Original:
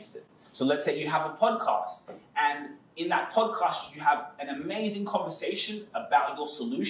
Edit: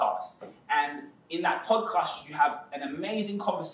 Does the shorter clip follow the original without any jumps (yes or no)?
yes